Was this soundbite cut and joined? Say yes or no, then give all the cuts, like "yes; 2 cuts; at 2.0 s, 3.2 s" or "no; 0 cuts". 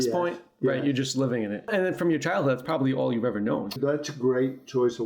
yes; 2 cuts; at 1.7 s, 3.8 s